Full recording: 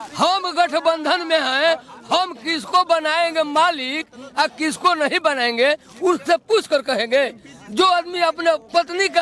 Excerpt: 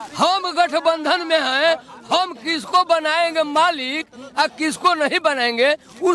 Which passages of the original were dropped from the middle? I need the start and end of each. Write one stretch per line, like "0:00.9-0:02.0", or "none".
none